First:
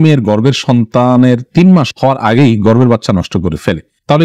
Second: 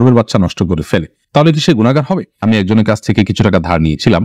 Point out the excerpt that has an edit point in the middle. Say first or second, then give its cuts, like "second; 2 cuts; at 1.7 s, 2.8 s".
second; 1 cut; at 2.4 s